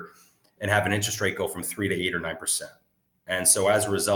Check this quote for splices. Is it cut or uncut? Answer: uncut